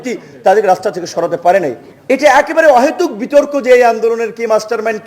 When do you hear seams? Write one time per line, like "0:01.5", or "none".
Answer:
0:01.9